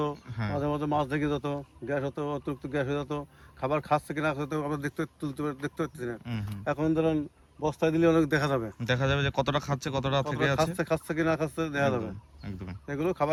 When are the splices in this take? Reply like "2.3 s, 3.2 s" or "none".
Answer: none